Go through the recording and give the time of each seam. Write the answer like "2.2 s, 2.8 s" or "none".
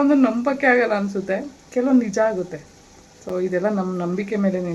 none